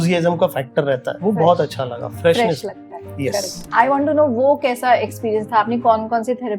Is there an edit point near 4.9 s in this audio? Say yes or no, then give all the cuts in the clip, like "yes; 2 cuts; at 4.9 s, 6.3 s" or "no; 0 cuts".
no; 2 cuts; at 1.1 s, 3.6 s